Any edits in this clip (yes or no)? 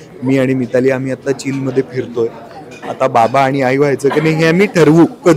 no